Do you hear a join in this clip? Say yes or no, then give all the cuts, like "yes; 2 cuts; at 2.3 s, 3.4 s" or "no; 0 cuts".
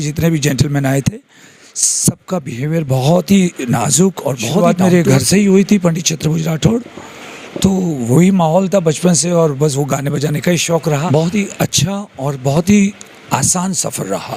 yes; 2 cuts; at 4.6 s, 11.1 s